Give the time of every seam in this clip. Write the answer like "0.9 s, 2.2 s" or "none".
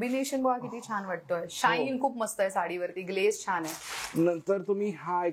none